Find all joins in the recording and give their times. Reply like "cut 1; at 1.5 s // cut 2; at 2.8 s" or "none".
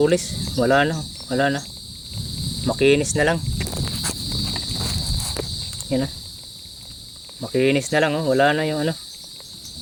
none

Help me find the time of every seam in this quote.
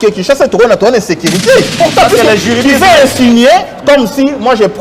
cut 1; at 1.8 s

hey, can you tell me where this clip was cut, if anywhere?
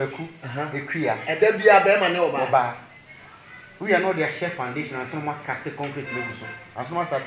none

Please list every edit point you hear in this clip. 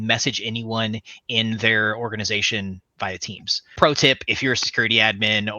cut 1; at 3.7 s

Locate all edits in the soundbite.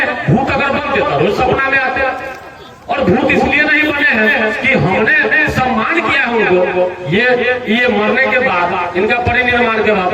none

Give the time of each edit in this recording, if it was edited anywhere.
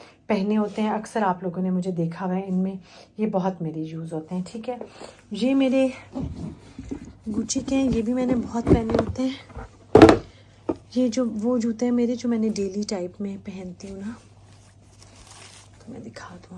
none

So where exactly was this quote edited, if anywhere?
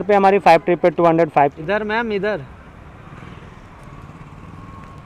cut 1; at 1.5 s

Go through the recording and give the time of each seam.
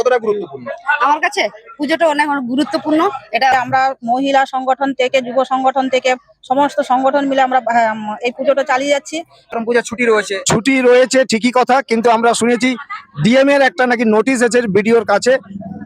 cut 1; at 3.5 s // cut 2; at 9.5 s

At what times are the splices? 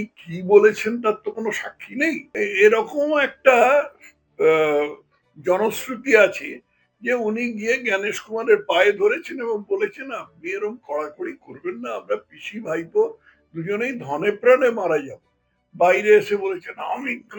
cut 1; at 2.3 s

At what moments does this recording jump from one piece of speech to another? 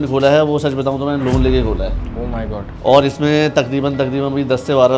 none

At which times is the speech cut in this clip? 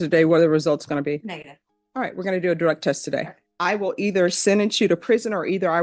cut 1; at 3.4 s

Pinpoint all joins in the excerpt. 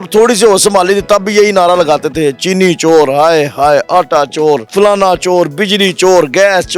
cut 1; at 4.7 s

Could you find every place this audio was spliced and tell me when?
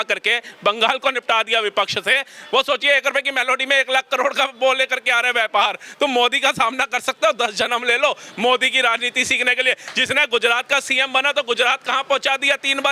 none

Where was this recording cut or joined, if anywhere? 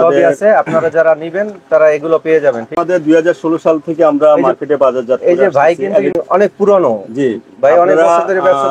cut 1; at 2.8 s // cut 2; at 6.2 s

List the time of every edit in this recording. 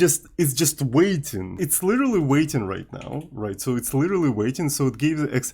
cut 1; at 1.5 s

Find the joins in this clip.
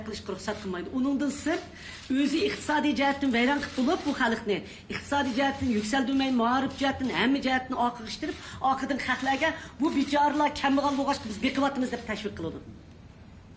cut 1; at 6.5 s

